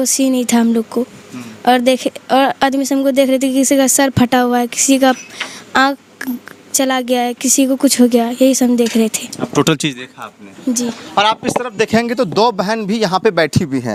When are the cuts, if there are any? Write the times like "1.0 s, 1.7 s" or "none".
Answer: none